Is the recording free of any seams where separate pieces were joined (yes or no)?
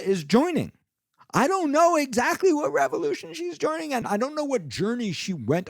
no